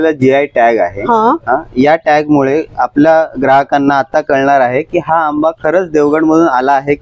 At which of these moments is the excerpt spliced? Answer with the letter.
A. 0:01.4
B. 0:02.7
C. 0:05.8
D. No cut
D